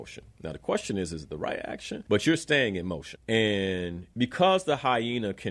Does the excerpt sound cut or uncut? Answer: cut